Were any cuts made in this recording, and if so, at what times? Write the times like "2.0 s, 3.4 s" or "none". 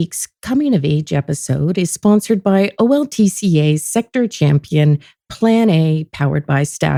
none